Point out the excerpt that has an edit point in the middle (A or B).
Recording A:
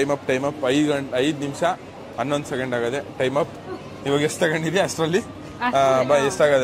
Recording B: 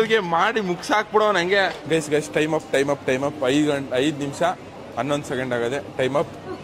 B